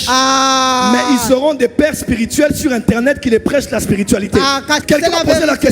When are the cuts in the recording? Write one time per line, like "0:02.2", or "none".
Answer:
0:04.7